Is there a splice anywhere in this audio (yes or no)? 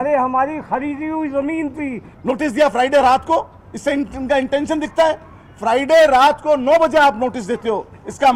yes